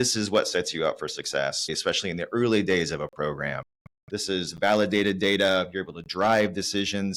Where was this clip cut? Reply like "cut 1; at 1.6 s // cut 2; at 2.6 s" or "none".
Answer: none